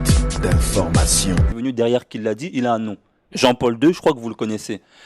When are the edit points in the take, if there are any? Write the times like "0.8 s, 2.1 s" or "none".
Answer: none